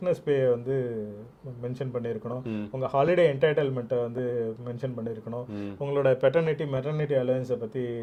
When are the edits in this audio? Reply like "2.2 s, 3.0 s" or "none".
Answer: none